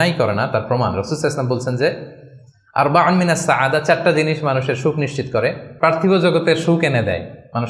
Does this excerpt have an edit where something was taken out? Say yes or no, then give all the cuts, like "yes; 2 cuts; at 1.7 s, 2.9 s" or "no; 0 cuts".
yes; 1 cut; at 5.6 s